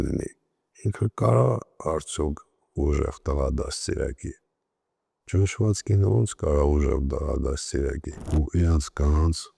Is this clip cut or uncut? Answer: cut